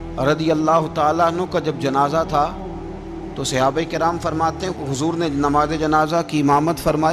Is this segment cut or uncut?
uncut